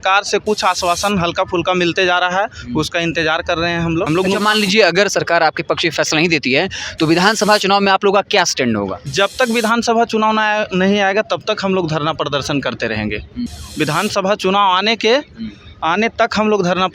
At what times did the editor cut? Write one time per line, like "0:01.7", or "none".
0:04.1
0:13.6